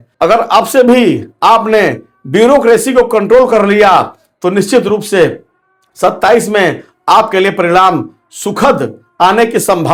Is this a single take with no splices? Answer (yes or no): yes